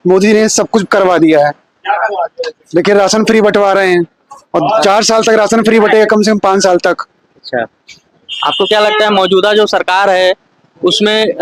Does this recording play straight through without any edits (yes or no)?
yes